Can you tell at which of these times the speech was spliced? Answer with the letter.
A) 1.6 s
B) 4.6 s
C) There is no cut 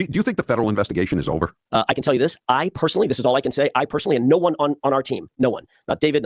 A